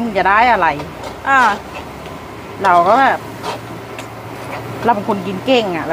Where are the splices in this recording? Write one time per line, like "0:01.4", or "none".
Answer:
none